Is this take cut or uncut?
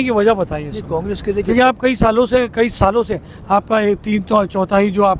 uncut